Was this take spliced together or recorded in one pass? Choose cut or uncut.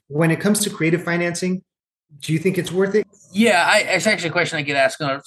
cut